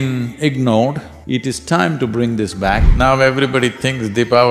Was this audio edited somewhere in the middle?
yes; 2 cuts; at 1.1 s, 2.8 s

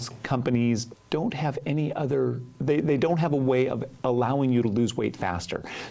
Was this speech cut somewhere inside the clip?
yes; 1 cut; at 0.9 s

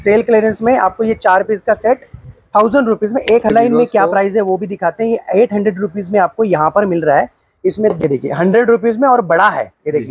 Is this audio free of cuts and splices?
no; 2 cuts; at 3.5 s, 8.0 s

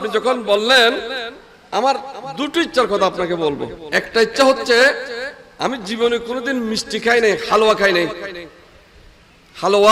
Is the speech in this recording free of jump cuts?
no; 1 cut; at 3.8 s

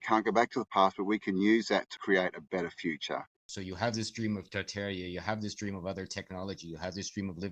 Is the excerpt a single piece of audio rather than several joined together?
no; 2 cuts; at 1.9 s, 3.5 s

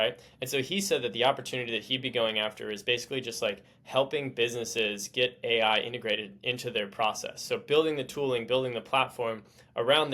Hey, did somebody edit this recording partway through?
no; 0 cuts

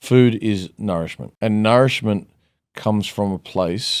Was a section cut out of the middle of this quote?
yes; 1 cut; at 1.2 s

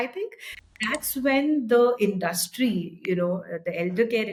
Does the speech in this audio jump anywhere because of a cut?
no; 0 cuts

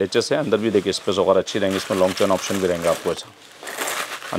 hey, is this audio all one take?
yes; 0 cuts

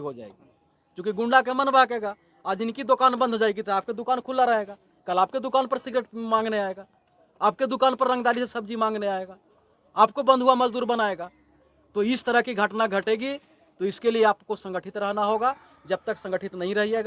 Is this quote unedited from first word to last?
yes; 0 cuts

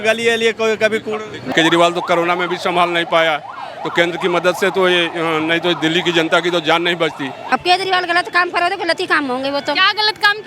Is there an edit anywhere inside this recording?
yes; 2 cuts; at 1.5 s, 7.4 s

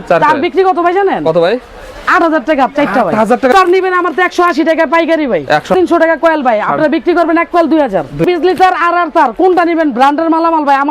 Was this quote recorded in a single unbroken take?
no; 3 cuts; at 3.5 s, 5.7 s, 8.2 s

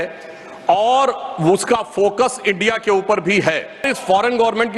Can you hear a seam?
yes; 1 cut; at 3.8 s

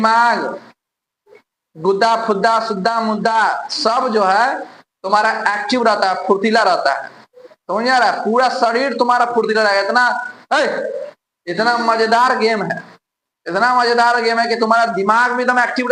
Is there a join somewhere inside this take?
no; 0 cuts

